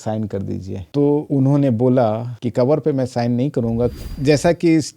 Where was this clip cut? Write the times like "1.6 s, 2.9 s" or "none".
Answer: 4.0 s